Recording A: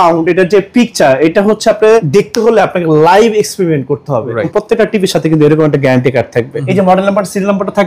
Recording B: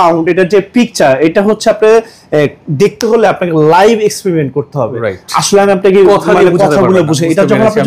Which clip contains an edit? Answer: A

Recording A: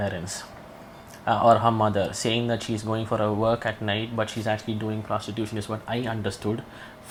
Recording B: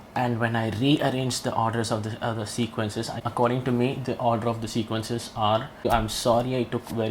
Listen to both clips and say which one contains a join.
B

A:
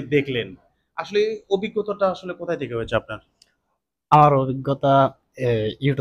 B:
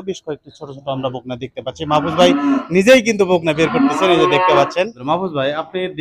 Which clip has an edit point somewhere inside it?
B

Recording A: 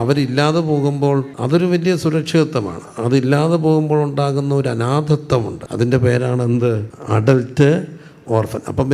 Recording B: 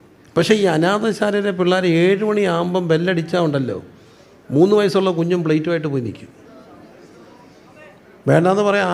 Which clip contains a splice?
A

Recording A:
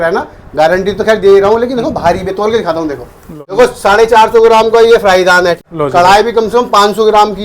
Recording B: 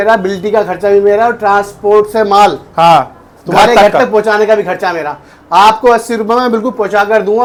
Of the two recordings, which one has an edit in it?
A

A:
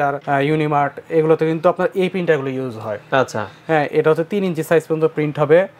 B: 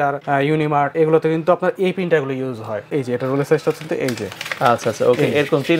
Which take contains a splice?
B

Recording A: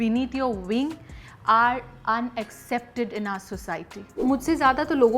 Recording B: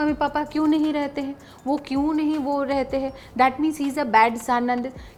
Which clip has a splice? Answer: A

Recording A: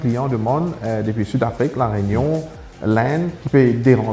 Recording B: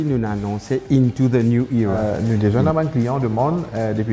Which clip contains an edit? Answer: B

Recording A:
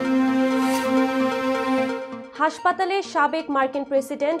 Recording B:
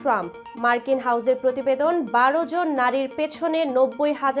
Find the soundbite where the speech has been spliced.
A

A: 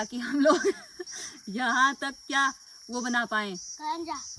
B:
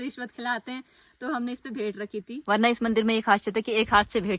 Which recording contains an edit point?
B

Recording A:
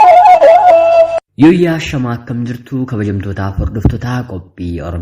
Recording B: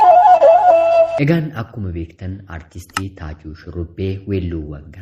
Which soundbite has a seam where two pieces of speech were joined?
A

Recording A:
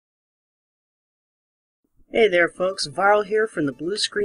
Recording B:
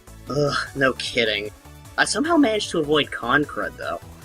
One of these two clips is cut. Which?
B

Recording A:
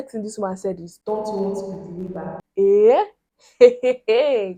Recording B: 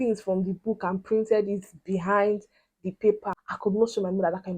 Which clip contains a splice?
B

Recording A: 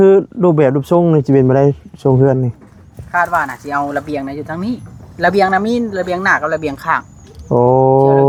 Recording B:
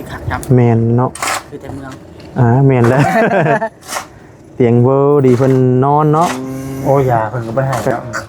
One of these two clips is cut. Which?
B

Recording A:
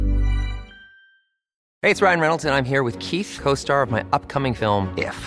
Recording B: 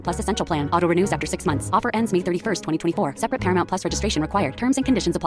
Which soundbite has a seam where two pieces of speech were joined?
A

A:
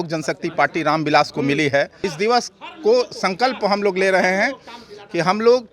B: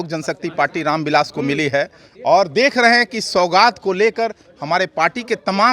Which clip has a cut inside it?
A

